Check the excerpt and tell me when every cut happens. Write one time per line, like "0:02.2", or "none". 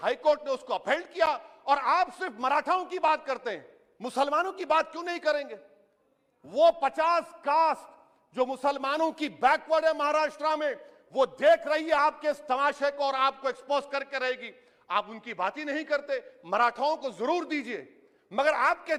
none